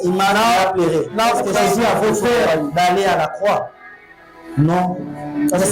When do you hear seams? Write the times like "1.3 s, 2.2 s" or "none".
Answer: 1.5 s